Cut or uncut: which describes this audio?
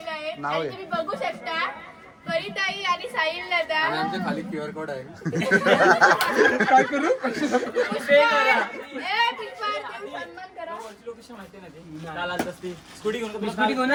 uncut